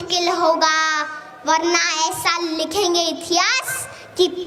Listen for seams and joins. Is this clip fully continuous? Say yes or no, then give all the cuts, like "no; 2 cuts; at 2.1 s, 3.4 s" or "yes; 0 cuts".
yes; 0 cuts